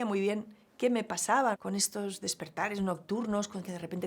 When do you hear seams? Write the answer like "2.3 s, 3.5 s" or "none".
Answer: 1.6 s